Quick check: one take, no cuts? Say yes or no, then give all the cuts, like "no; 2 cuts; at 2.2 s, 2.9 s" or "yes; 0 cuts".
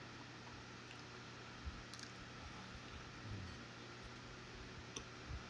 yes; 0 cuts